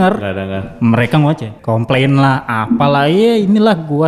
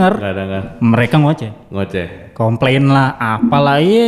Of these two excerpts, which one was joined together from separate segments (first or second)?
first